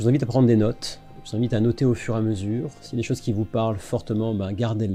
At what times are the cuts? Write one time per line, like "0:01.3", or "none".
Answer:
none